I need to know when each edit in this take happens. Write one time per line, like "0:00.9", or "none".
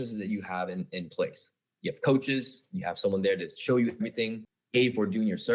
0:04.5